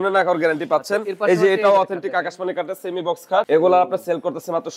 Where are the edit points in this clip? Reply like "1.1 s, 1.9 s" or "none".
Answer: none